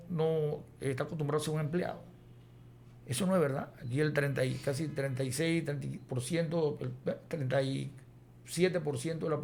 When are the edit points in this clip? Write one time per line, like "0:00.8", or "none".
none